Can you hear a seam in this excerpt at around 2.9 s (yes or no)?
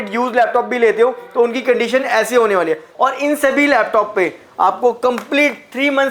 yes